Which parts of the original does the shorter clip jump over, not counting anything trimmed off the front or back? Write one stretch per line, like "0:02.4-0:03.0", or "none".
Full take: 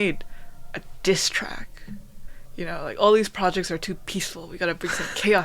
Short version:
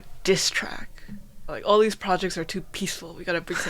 0:02.3-0:02.8